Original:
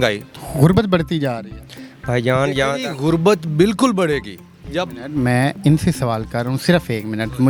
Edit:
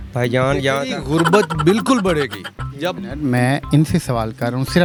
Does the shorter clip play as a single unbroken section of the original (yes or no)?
yes